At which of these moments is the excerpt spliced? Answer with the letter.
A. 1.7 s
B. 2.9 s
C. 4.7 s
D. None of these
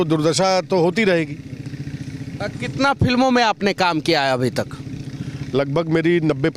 D